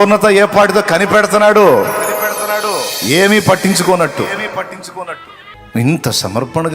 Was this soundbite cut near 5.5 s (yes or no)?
yes